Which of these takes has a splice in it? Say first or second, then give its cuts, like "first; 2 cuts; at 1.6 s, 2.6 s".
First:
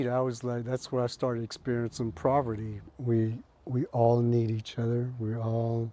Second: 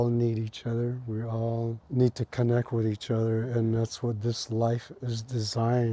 first; 1 cut; at 2.9 s